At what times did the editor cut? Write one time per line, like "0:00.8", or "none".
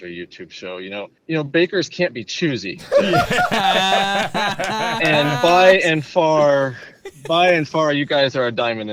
none